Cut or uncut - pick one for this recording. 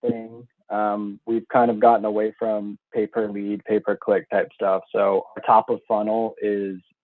uncut